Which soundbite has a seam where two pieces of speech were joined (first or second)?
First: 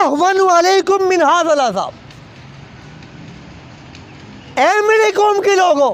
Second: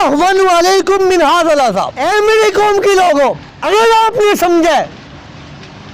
second